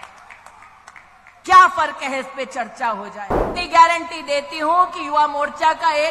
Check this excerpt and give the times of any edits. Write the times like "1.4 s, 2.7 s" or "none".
3.5 s